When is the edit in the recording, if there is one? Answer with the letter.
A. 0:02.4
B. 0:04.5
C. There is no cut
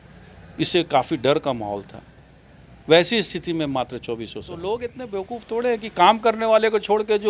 B